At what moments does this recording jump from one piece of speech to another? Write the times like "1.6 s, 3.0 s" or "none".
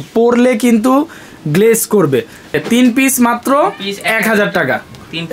2.6 s